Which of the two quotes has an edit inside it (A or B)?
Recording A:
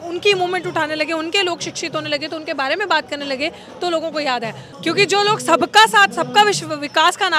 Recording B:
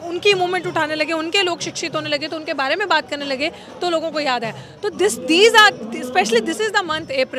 A